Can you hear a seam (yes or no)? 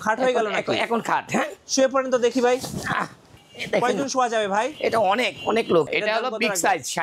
yes